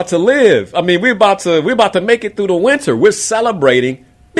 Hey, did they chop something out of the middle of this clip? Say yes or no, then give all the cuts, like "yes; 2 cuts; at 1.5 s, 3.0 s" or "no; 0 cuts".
no; 0 cuts